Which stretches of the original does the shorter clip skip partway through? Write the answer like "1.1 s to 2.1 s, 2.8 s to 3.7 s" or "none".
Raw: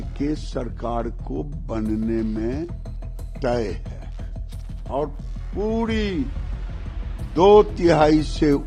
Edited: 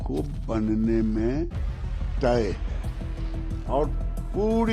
none